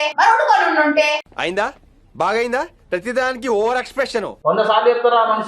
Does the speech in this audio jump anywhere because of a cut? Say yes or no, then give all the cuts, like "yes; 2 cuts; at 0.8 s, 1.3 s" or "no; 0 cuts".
yes; 1 cut; at 4.3 s